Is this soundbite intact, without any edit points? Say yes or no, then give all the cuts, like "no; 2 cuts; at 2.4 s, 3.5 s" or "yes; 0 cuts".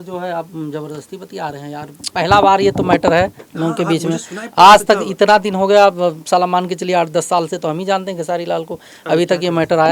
yes; 0 cuts